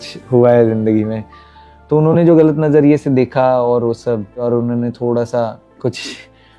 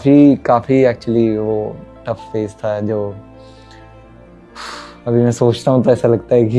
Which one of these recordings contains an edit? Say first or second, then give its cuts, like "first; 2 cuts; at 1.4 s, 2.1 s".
first; 2 cuts; at 1.2 s, 4.4 s